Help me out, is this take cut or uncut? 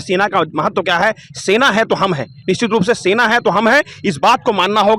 uncut